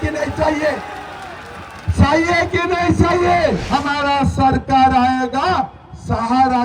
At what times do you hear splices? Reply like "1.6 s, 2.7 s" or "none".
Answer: 3.6 s